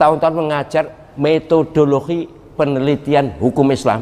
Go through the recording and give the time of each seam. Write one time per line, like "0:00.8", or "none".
0:01.0
0:02.4